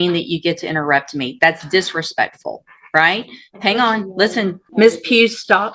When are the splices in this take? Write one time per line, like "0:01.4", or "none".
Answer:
0:04.6